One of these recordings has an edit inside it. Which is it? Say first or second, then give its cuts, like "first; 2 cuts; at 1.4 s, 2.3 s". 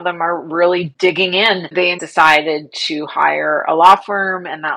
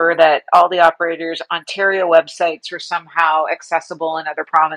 first; 2 cuts; at 0.9 s, 2.0 s